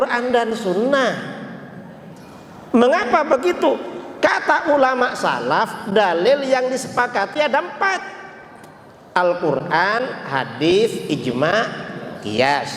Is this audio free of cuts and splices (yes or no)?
yes